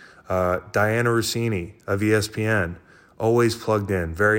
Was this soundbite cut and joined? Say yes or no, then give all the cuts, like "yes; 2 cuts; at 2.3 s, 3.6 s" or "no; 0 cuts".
no; 0 cuts